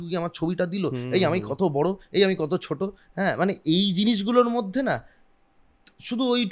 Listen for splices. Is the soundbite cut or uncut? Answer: uncut